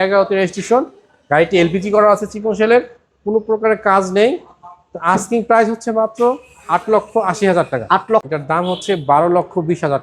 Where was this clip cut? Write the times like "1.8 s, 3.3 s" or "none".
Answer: 8.2 s